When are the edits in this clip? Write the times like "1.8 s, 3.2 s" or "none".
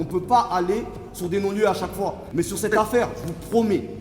2.2 s